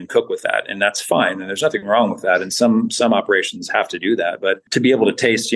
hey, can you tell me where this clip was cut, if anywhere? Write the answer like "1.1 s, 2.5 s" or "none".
4.6 s

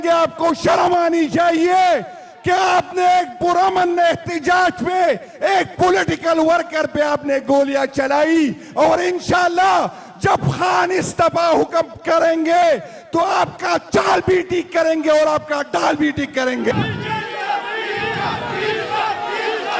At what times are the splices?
16.7 s

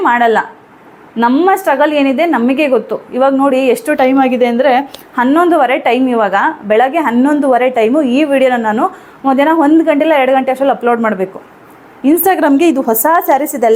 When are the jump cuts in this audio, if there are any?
none

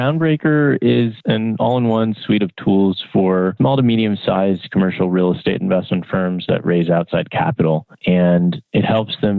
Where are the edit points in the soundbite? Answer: 1.2 s, 3.5 s

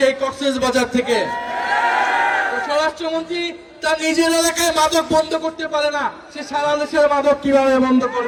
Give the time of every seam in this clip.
none

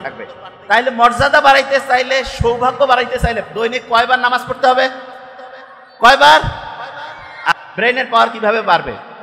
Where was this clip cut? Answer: 7.5 s

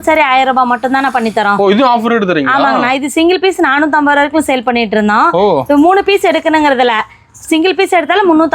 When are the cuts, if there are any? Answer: none

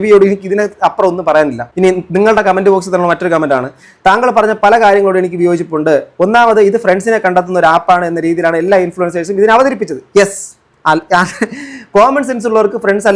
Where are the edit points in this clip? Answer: 1.6 s

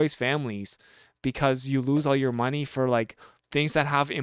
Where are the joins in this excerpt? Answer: none

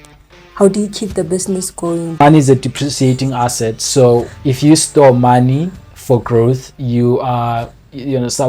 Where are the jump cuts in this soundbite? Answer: 2.2 s

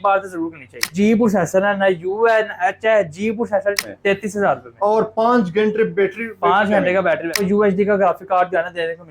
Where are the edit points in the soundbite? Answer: 0.9 s, 3.8 s, 7.4 s

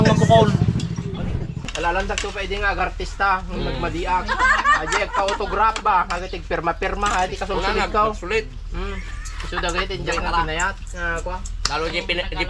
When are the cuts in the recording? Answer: 1.5 s

